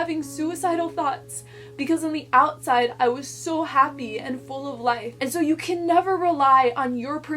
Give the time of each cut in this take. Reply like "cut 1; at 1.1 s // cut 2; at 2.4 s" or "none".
cut 1; at 5.1 s